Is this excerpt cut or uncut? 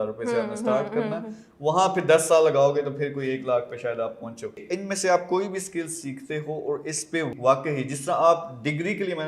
cut